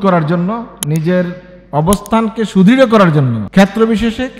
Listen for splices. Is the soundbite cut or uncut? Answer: cut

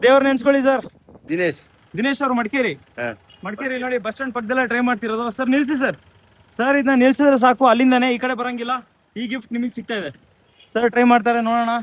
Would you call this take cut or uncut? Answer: cut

